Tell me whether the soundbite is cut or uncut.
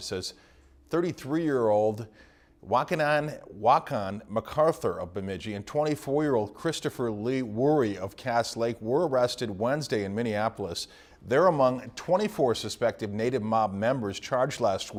uncut